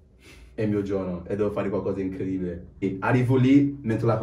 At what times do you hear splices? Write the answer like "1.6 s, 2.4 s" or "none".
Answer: 2.8 s